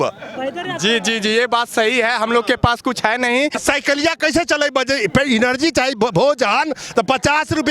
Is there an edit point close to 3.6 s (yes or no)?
yes